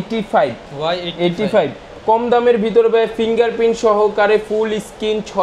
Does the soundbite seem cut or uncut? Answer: uncut